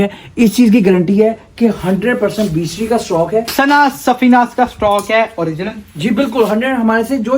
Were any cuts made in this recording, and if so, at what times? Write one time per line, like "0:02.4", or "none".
0:03.5